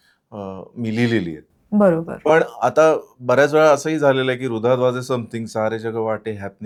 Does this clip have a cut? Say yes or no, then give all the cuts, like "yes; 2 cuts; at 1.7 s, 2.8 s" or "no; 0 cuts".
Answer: no; 0 cuts